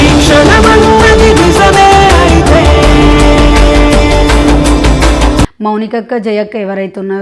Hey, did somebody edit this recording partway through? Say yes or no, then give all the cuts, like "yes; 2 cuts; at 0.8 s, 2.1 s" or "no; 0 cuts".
yes; 1 cut; at 5.6 s